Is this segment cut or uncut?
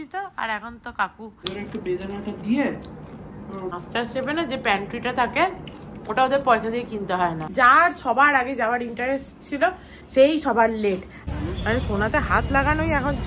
cut